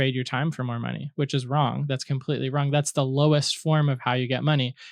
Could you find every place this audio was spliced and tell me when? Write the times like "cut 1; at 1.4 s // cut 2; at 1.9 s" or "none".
none